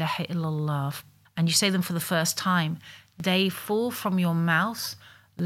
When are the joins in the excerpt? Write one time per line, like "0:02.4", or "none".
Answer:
0:01.1